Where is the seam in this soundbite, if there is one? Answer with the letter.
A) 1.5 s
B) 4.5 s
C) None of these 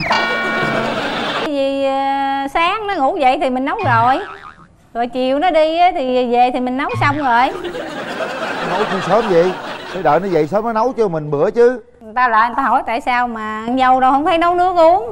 A